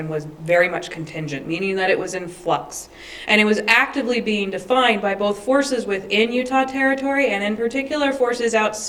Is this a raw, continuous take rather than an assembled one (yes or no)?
yes